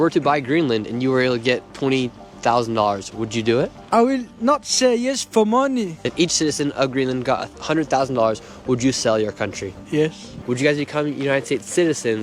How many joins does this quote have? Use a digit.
2